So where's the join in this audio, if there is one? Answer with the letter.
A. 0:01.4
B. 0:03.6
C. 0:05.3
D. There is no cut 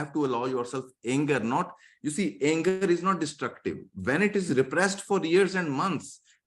D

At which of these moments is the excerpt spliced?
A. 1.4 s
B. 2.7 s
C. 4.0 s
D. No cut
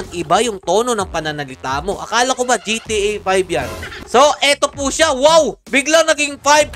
C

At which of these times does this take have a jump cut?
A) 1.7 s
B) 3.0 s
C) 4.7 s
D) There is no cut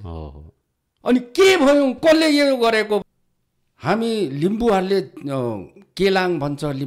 B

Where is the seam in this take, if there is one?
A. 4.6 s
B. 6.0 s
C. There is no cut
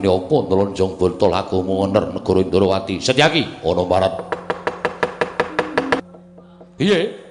B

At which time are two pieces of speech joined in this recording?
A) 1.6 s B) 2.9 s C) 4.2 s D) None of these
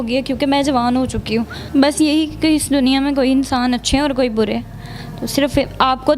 A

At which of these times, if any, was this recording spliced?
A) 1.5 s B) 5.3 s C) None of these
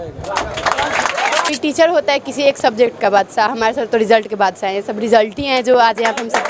A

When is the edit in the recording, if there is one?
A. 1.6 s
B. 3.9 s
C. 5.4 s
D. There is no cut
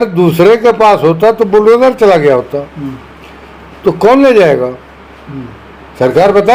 D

